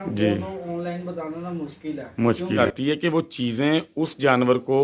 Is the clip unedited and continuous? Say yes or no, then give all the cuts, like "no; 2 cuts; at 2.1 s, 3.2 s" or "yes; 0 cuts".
no; 1 cut; at 2.6 s